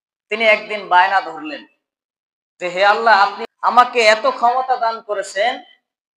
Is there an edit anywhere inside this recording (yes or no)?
yes